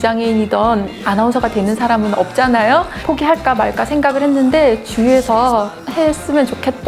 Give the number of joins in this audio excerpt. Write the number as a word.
zero